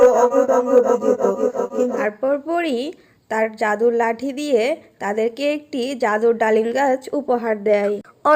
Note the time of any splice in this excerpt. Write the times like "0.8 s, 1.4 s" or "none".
2.0 s